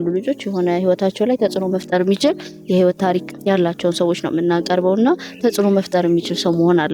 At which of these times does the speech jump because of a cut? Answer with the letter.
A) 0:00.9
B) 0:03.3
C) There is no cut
B